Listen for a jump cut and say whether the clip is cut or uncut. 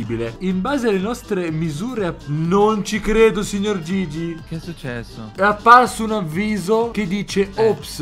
uncut